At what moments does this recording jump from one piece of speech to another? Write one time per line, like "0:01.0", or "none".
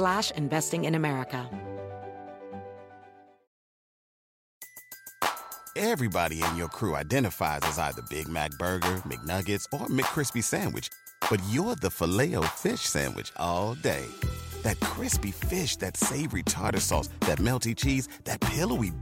0:01.5